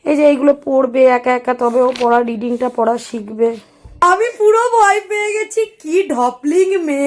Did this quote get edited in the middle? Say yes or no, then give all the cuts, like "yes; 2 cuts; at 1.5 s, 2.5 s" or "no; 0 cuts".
yes; 1 cut; at 4.0 s